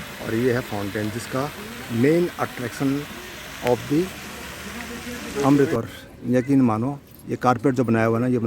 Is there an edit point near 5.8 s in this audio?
yes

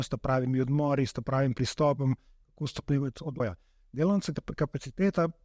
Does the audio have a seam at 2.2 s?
no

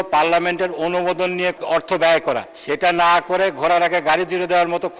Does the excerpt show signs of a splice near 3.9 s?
no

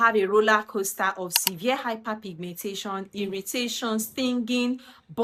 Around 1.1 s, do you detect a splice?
no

